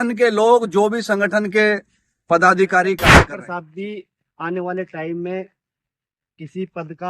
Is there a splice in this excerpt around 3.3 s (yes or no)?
yes